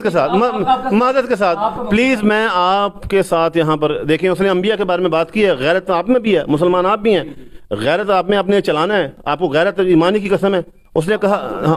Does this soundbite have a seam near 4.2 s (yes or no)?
no